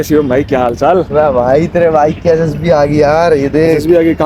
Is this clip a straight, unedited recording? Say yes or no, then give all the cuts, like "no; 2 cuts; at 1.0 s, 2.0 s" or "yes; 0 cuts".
yes; 0 cuts